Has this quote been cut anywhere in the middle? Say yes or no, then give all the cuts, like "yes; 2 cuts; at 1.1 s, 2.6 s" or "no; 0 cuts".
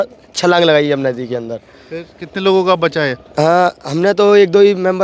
no; 0 cuts